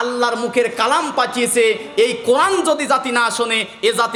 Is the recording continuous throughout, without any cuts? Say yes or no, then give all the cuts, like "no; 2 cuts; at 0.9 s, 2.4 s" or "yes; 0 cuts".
yes; 0 cuts